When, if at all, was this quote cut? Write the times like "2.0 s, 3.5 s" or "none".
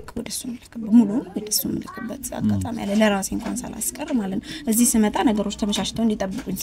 none